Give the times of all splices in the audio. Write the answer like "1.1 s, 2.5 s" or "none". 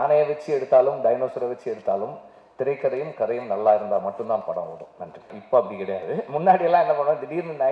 5.4 s